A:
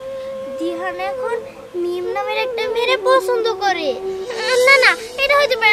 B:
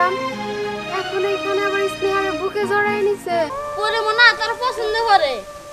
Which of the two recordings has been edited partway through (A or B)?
B